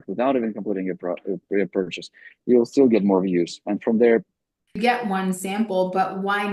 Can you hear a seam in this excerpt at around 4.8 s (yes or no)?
yes